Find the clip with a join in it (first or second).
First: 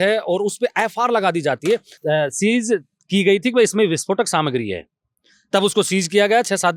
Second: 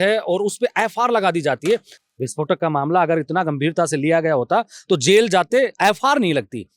second